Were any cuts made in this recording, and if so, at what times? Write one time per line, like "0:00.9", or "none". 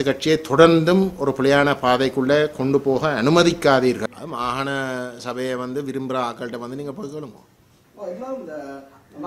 0:04.1

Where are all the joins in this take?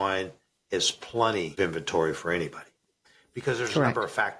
0:01.5

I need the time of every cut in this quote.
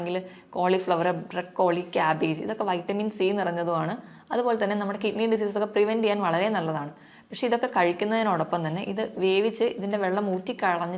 none

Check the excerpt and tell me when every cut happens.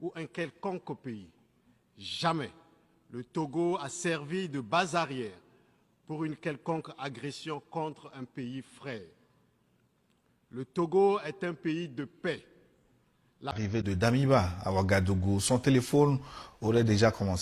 0:13.5

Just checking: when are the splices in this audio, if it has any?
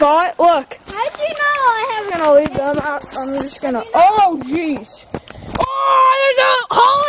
0:02.1

